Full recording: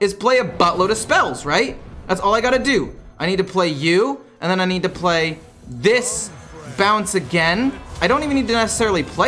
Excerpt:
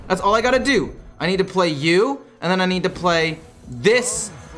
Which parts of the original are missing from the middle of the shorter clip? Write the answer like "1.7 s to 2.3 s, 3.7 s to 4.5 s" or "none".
none